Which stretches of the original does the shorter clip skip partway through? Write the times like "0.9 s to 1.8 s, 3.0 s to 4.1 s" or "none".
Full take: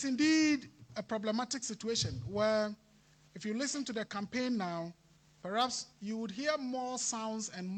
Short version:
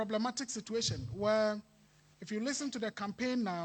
none